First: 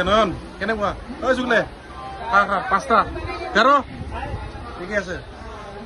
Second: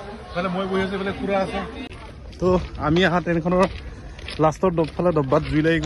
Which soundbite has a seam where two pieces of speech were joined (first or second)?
second